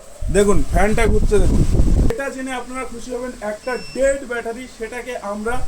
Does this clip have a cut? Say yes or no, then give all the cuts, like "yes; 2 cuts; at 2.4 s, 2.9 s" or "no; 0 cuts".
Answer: yes; 1 cut; at 2.1 s